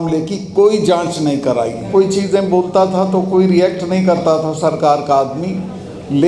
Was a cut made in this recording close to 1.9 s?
yes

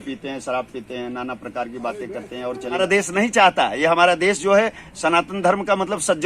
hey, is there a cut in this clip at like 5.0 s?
no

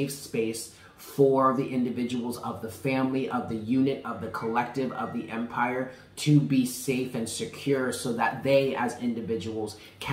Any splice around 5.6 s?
no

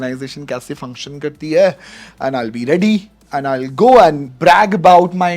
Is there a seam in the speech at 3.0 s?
no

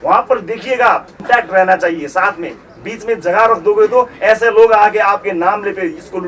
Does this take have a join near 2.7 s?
no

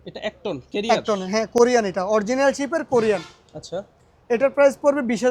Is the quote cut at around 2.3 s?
no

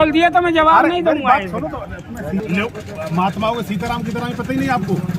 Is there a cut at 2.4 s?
yes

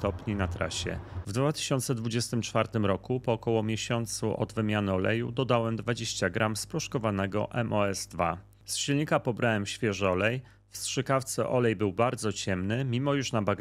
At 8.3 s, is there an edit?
no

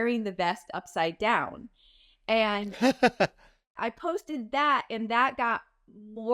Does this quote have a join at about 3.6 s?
yes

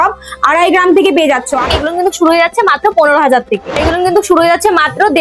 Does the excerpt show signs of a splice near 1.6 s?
yes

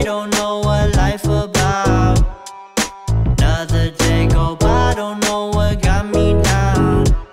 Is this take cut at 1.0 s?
no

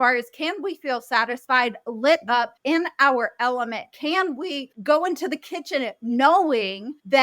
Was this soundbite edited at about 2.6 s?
no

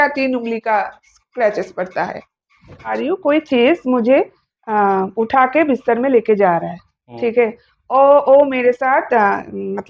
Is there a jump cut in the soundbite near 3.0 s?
yes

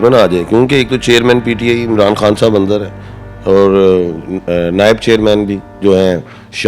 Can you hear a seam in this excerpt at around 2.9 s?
no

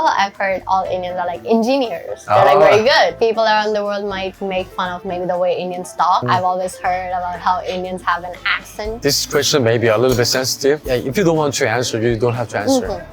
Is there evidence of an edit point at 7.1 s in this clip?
no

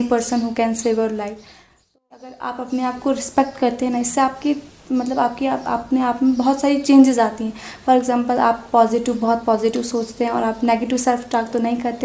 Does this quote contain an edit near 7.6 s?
no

